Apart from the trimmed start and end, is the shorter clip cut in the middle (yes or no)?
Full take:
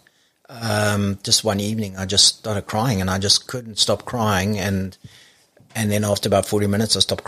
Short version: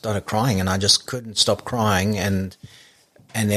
no